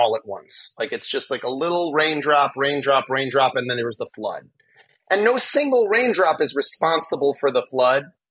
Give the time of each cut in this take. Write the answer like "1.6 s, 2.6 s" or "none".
none